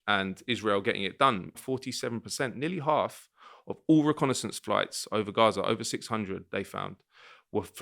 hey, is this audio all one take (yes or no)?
no